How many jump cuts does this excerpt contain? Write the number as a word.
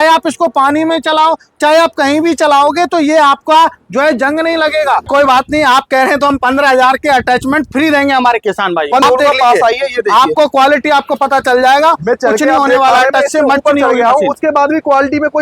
two